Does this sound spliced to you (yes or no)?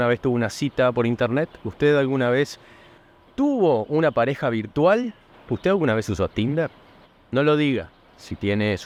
no